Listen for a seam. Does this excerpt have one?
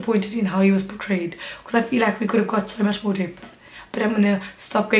no; 0 cuts

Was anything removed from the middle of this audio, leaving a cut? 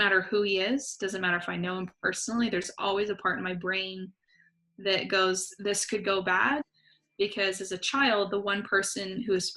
yes; 1 cut; at 6.7 s

